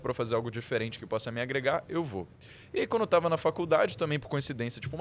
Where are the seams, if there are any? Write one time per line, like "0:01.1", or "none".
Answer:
none